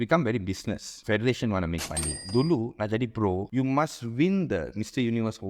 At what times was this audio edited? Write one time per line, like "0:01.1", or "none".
0:00.9
0:02.2
0:03.5